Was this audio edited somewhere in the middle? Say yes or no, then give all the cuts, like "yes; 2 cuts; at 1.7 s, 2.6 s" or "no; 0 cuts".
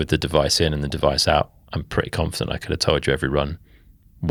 no; 0 cuts